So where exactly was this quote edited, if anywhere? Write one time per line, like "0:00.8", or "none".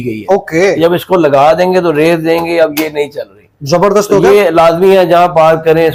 none